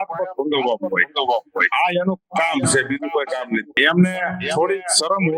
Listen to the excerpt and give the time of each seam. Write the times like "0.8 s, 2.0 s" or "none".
3.7 s